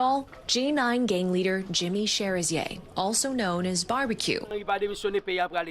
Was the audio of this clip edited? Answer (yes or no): yes